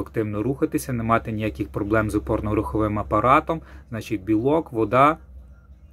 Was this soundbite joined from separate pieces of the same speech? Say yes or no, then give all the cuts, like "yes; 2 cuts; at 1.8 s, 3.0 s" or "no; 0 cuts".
no; 0 cuts